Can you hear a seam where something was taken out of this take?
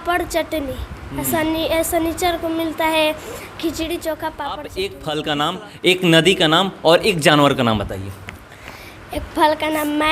yes; 1 cut; at 4.6 s

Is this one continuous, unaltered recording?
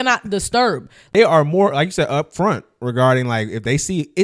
no; 1 cut; at 1.0 s

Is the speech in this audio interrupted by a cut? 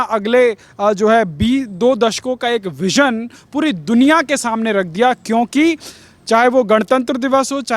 no; 0 cuts

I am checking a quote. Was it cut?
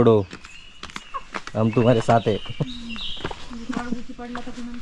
no; 0 cuts

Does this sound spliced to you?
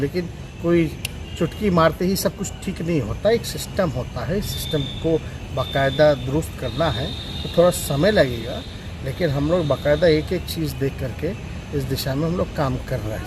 no; 0 cuts

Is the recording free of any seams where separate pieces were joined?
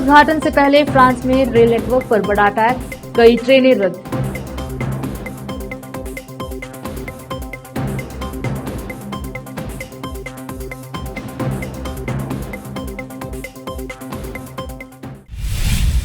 no; 1 cut; at 15.1 s

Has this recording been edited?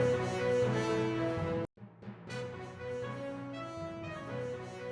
yes; 1 cut; at 1.4 s

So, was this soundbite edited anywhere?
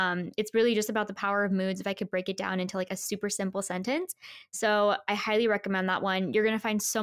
no; 0 cuts

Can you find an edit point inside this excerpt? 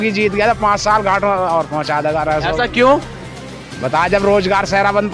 no; 0 cuts

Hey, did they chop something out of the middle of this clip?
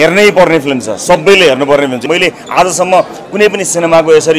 yes; 1 cut; at 2.1 s

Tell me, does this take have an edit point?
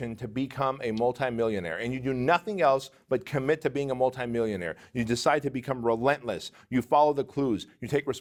no; 0 cuts

